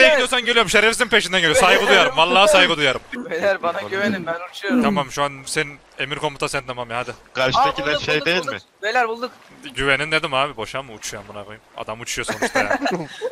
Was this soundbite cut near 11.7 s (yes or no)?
no